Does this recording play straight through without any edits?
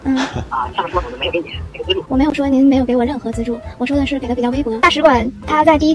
no; 2 cuts; at 2.1 s, 4.8 s

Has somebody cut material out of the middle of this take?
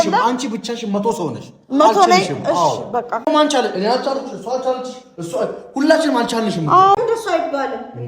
yes; 2 cuts; at 3.3 s, 7.0 s

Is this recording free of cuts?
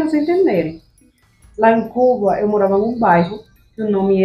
yes; 0 cuts

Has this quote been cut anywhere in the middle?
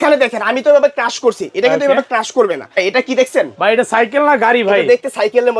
yes; 1 cut; at 2.8 s

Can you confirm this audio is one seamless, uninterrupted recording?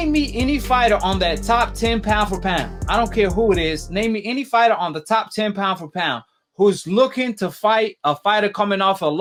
yes; 0 cuts

